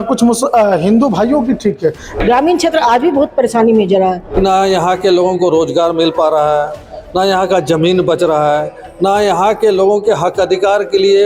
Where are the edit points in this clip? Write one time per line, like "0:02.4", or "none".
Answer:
0:02.1
0:04.3